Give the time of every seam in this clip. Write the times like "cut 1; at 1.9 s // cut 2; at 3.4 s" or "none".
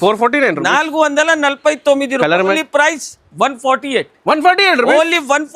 cut 1; at 2.6 s

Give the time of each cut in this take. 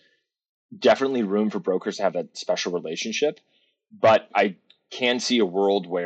cut 1; at 2.3 s // cut 2; at 4.3 s

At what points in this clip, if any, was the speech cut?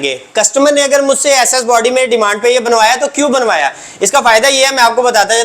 none

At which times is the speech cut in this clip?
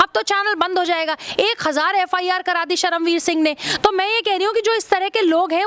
none

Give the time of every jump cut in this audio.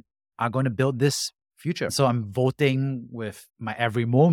cut 1; at 1.9 s

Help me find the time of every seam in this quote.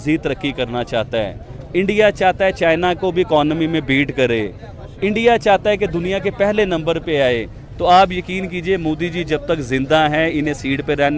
none

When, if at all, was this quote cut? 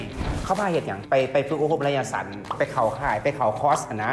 cut 1; at 2.5 s

